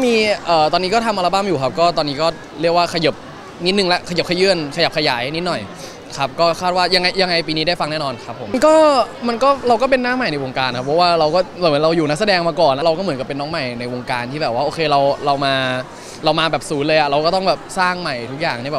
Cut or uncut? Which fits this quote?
cut